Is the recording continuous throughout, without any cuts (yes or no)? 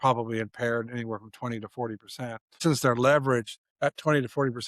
no